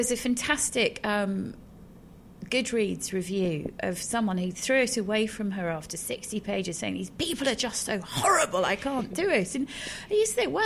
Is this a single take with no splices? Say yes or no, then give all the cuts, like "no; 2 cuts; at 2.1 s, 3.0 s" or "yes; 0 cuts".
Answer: yes; 0 cuts